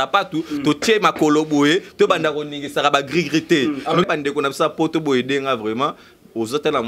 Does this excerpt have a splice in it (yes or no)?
yes